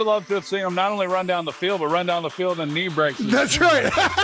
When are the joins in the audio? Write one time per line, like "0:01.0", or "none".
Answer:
0:03.2